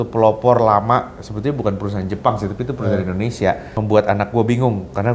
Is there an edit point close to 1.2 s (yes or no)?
no